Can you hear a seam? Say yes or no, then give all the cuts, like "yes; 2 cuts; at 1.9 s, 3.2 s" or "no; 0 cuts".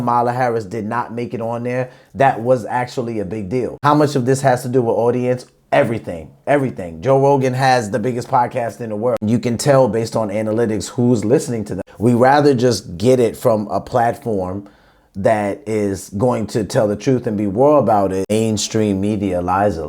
yes; 4 cuts; at 3.8 s, 9.2 s, 11.8 s, 18.3 s